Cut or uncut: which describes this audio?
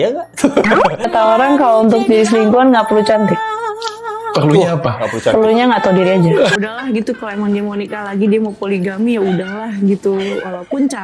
cut